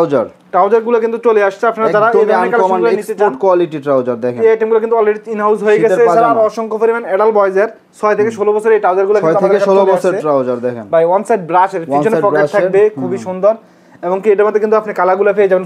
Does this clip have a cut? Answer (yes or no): no